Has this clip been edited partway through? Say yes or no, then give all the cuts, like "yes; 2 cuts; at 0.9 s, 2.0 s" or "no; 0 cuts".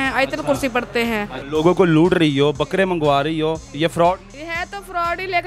yes; 2 cuts; at 1.3 s, 4.3 s